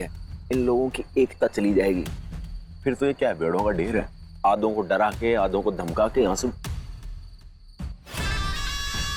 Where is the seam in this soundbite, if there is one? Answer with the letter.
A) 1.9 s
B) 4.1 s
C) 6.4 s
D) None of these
D